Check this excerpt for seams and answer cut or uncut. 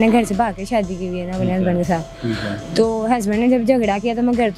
uncut